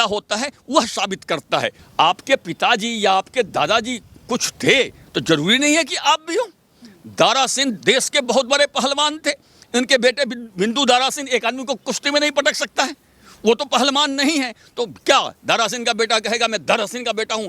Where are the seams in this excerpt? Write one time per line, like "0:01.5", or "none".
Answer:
0:01.8